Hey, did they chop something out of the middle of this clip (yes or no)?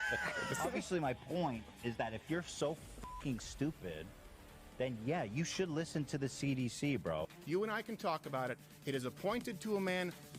no